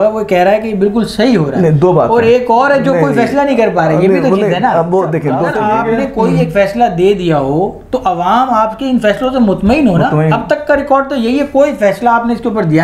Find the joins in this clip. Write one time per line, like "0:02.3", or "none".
0:05.5